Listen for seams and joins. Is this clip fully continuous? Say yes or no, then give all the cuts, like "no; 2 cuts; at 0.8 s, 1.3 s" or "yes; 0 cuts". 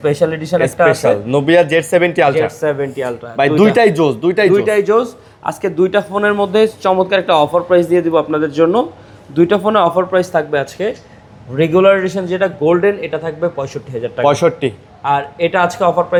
yes; 0 cuts